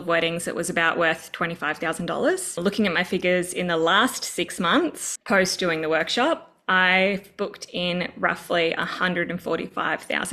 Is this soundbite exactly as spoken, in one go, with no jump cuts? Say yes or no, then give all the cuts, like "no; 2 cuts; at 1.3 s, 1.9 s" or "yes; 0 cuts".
no; 2 cuts; at 2.6 s, 5.1 s